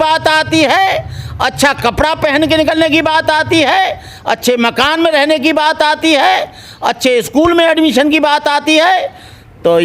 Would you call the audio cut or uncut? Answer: uncut